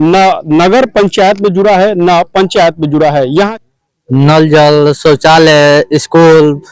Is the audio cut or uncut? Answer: cut